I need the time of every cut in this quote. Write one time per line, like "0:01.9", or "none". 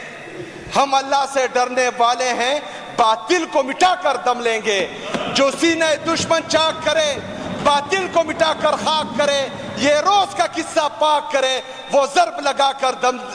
none